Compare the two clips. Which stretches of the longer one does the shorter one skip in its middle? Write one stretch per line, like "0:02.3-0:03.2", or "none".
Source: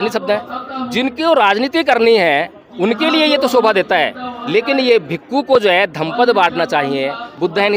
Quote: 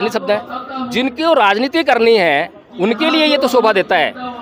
none